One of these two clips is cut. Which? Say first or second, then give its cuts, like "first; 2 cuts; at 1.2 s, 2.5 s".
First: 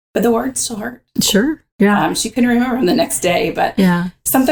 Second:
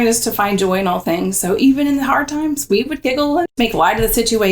second; 1 cut; at 3.5 s